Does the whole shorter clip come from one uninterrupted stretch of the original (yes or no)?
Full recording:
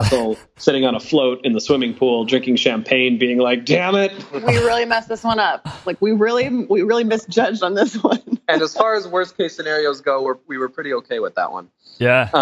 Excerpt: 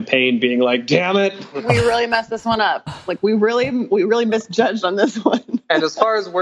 yes